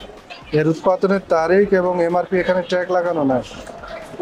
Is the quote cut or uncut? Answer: uncut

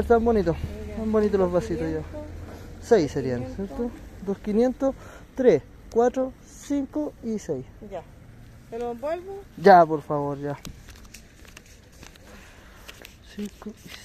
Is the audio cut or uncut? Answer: uncut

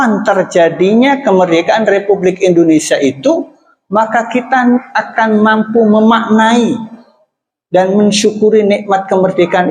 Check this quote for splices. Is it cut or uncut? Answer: uncut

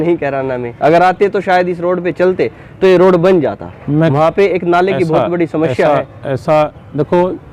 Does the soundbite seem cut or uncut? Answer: uncut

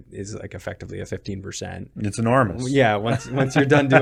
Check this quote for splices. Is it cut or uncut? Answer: uncut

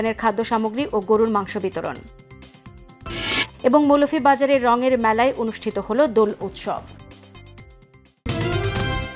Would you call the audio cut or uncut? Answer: cut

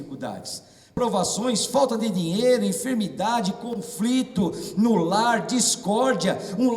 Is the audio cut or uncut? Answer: cut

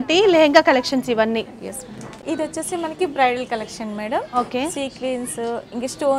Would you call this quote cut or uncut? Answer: uncut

